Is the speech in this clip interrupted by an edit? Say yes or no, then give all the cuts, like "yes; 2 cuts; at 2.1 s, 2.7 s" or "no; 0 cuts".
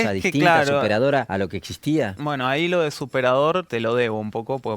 yes; 3 cuts; at 1.3 s, 2.2 s, 3.7 s